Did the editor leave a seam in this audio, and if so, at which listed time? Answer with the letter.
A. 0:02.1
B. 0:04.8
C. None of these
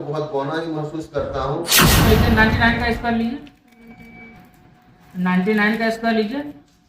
A